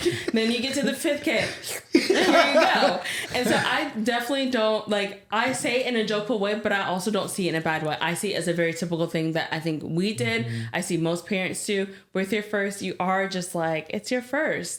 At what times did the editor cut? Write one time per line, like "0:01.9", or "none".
none